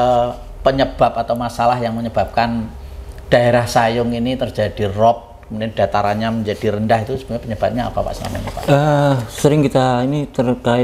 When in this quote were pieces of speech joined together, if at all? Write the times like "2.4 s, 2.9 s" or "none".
none